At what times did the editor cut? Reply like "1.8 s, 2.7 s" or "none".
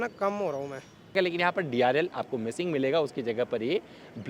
1.1 s